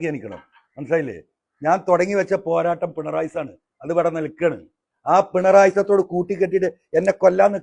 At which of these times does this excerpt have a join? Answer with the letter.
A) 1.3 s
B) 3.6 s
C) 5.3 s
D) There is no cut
D